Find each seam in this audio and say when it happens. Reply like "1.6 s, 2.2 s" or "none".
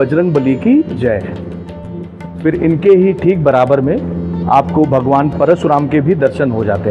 2.2 s